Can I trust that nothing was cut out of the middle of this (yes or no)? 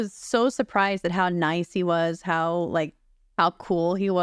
yes